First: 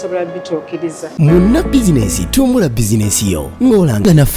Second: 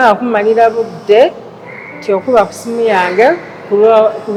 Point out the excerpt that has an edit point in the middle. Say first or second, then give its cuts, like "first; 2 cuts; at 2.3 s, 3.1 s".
first; 1 cut; at 1.0 s